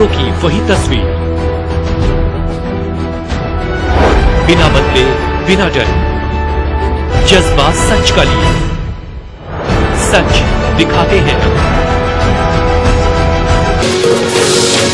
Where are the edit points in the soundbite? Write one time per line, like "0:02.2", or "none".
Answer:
none